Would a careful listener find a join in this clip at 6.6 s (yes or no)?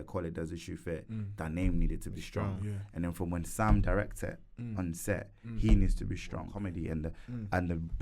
yes